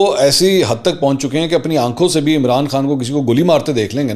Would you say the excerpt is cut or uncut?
uncut